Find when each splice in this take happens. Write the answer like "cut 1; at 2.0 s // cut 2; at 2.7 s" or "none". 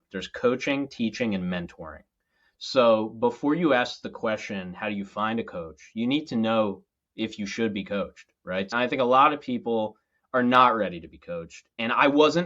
cut 1; at 8.7 s